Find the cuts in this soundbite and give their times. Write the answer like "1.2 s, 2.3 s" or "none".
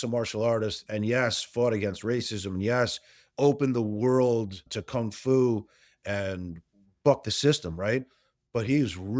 8.3 s